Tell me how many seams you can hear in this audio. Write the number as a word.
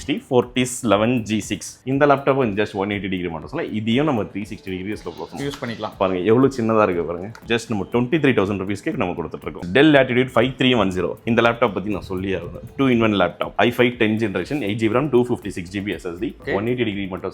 four